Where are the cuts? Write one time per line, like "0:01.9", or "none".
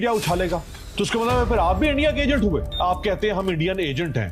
0:02.7